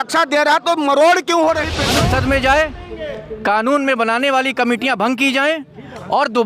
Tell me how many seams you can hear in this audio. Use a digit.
1